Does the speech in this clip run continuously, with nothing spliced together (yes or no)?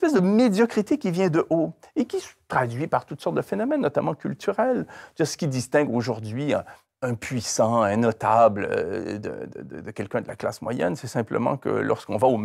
yes